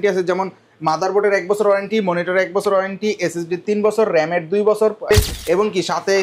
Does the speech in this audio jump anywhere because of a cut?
yes; 1 cut; at 5.1 s

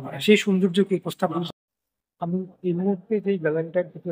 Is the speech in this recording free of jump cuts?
no; 1 cut; at 1.4 s

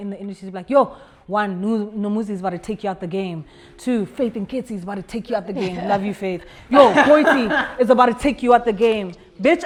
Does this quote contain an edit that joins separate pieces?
no; 0 cuts

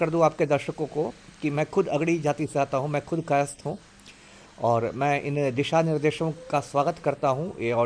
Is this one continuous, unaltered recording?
yes; 0 cuts

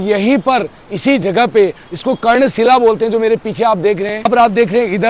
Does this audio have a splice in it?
no; 0 cuts

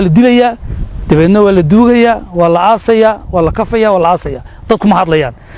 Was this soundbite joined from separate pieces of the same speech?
no; 0 cuts

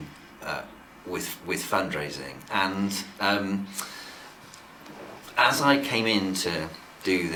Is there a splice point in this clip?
no; 0 cuts

